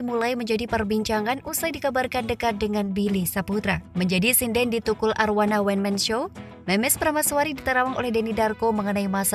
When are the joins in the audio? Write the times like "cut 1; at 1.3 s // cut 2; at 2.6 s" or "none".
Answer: cut 1; at 3.8 s